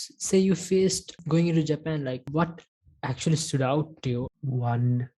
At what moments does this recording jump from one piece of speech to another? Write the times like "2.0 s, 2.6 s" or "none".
1.1 s, 2.3 s, 4.3 s